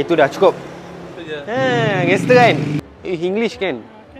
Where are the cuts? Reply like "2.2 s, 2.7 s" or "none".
2.8 s